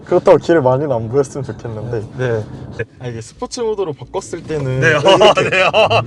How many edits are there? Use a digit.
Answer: 1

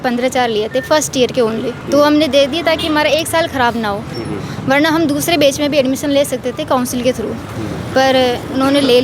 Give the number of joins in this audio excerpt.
0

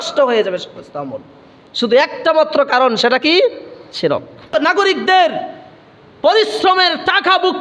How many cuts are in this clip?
1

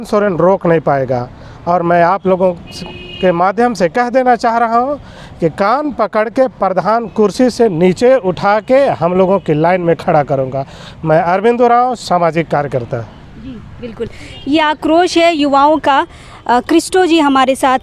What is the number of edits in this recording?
0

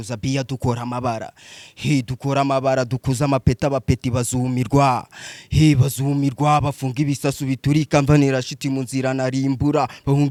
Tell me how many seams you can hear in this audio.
0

